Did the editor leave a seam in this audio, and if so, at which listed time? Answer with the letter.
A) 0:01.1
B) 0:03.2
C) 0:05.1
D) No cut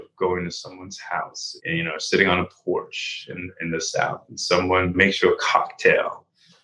D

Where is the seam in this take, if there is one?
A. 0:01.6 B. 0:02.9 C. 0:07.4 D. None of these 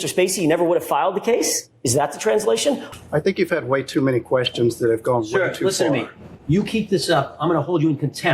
B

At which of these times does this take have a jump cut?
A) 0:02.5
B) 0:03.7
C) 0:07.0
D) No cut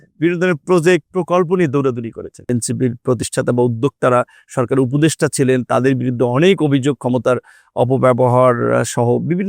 A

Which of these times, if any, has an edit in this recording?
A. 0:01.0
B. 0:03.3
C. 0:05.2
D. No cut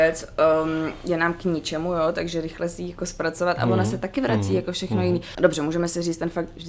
C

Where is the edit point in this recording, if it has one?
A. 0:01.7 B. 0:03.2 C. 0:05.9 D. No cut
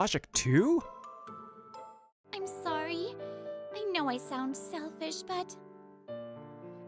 A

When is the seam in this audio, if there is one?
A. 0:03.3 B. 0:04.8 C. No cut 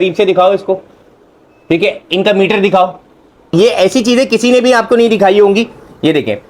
A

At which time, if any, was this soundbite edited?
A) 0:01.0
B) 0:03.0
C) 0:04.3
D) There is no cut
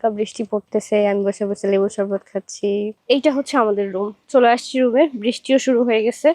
B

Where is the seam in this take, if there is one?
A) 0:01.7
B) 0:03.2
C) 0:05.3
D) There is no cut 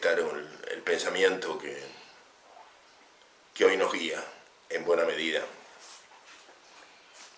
C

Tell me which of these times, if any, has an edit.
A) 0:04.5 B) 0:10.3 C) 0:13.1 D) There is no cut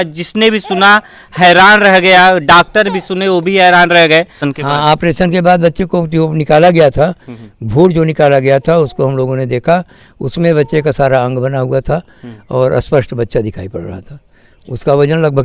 A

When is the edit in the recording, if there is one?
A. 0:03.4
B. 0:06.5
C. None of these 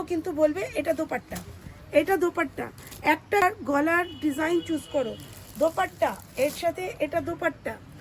A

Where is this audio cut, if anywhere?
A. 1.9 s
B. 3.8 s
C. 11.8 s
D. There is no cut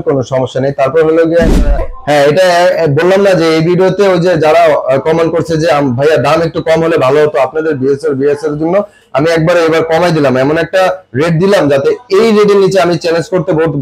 A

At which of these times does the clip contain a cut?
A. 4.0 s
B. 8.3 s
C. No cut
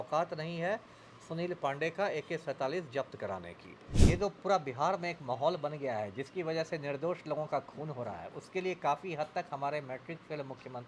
A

